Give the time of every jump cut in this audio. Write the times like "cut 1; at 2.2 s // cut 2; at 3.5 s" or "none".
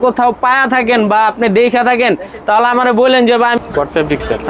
cut 1; at 3.6 s